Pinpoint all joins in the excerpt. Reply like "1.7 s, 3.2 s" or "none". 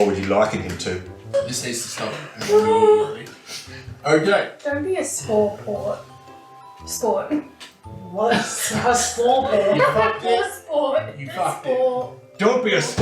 1.3 s